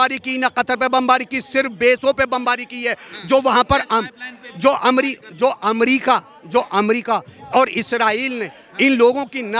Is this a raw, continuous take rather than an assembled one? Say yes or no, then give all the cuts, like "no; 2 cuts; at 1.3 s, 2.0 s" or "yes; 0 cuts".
yes; 0 cuts